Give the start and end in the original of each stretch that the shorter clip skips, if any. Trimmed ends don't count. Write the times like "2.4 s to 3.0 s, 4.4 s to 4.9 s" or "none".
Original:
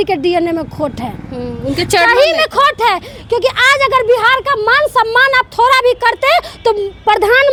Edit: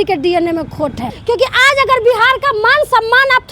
1.1 s to 3.1 s